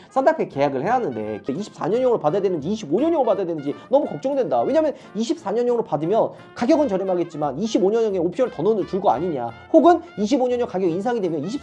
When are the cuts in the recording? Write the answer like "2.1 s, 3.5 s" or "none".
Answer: 1.5 s